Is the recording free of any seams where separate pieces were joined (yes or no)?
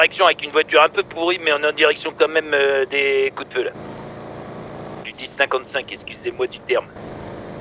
yes